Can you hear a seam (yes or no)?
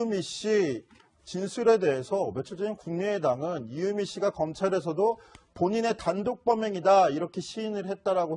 yes